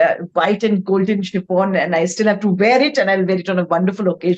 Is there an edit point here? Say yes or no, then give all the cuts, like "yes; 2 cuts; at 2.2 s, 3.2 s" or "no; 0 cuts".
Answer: no; 0 cuts